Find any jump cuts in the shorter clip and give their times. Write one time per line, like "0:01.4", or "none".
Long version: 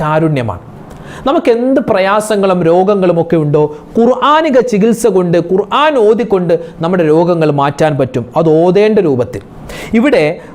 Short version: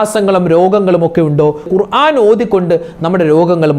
0:01.7